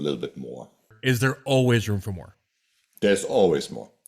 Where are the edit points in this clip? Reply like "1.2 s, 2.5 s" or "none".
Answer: 0.9 s